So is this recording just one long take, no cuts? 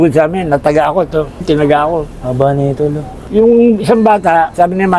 yes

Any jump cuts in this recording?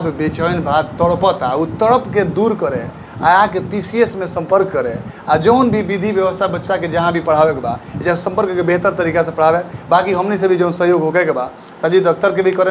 no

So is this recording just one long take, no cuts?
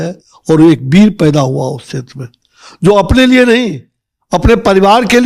yes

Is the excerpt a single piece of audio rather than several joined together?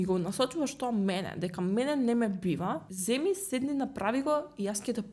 no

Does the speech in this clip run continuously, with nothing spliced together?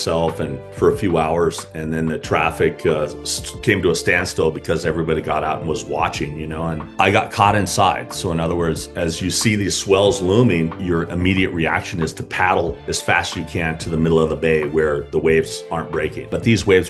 yes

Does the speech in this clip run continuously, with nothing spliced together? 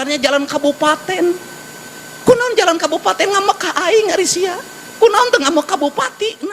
yes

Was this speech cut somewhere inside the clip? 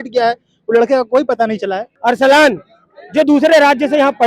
yes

